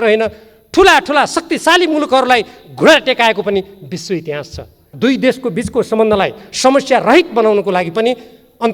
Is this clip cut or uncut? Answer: cut